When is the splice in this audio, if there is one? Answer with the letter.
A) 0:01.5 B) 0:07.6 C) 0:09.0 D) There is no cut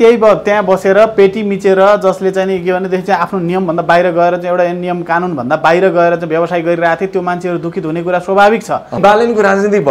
C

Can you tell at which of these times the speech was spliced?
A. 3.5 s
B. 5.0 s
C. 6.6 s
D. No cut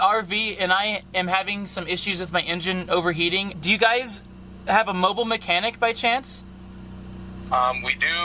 A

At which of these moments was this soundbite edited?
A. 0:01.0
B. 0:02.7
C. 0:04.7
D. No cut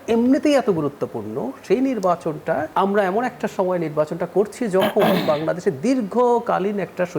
B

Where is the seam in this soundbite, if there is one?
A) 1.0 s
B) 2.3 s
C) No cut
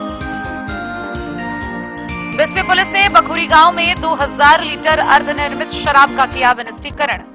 B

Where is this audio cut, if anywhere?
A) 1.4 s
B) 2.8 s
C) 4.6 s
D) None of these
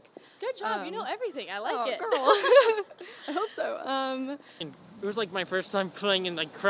C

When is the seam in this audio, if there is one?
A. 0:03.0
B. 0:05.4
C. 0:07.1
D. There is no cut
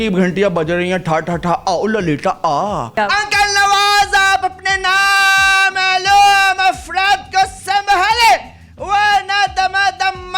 A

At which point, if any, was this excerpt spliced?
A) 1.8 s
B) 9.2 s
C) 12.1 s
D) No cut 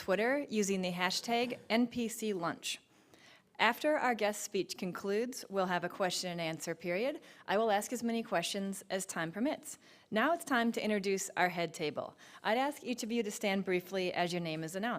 A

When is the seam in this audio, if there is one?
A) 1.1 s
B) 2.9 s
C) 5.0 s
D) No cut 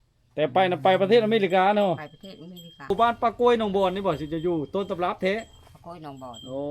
B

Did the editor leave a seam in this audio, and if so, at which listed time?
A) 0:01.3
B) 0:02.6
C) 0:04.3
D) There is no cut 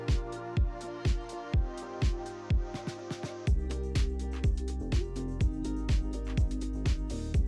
D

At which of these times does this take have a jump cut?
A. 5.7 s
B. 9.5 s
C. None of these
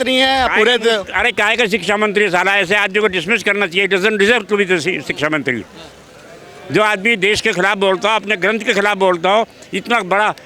C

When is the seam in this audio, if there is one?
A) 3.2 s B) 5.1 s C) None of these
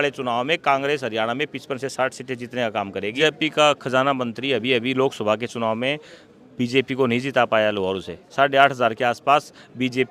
A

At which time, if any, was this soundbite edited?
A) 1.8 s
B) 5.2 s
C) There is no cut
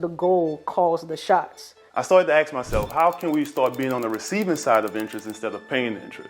A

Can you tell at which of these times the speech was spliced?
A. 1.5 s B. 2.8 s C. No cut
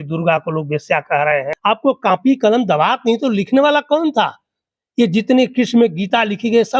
A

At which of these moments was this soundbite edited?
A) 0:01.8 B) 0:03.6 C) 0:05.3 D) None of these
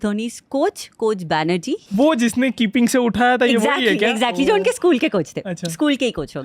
A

